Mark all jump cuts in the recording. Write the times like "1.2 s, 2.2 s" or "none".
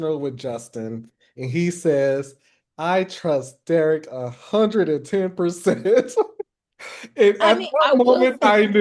none